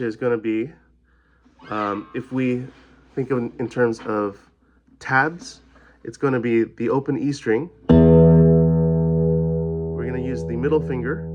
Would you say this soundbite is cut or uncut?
uncut